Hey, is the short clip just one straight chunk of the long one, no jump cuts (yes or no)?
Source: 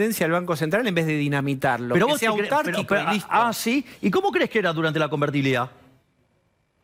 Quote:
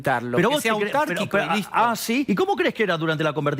no